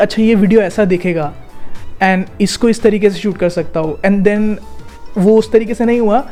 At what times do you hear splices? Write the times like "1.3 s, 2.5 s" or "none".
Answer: none